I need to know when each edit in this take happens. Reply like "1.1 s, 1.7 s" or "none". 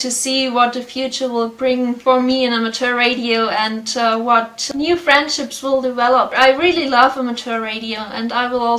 2.0 s, 4.7 s, 6.3 s